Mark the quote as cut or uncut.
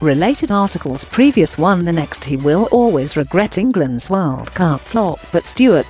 uncut